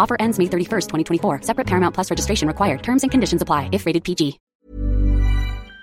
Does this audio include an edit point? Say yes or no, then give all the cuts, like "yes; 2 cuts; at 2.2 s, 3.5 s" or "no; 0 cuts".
yes; 1 cut; at 4.4 s